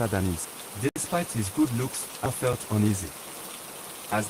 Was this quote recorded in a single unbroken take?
no; 2 cuts; at 1.0 s, 2.3 s

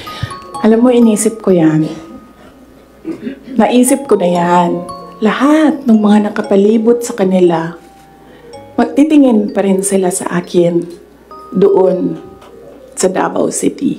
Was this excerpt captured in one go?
no; 1 cut; at 4.9 s

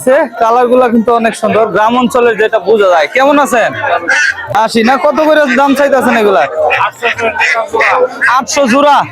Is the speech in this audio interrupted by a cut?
yes; 1 cut; at 4.4 s

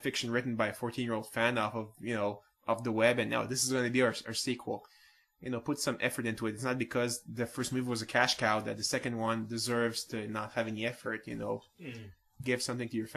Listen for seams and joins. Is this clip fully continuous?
yes; 0 cuts

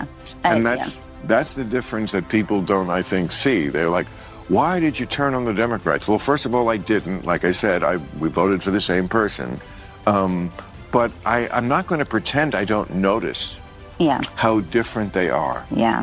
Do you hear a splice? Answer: no; 0 cuts

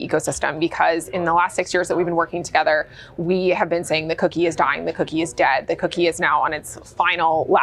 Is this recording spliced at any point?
no; 0 cuts

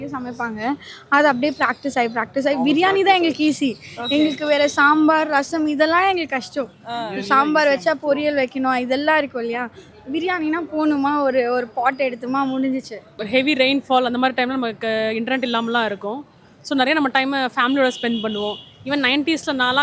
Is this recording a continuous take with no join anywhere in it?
no; 1 cut; at 13.2 s

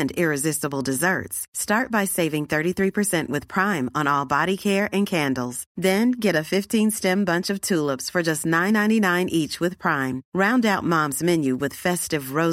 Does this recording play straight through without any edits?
yes; 0 cuts

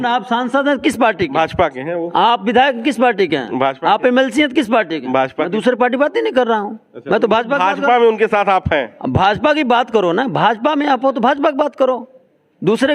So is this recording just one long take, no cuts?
yes; 0 cuts

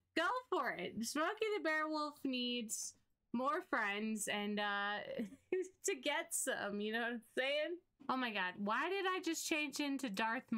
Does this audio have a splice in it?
yes; 1 cut; at 7.9 s

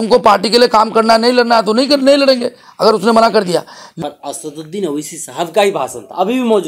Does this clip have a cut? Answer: yes; 1 cut; at 3.8 s

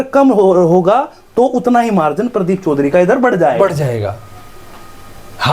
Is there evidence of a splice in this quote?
no; 0 cuts

